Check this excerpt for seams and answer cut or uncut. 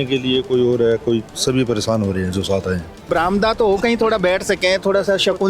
cut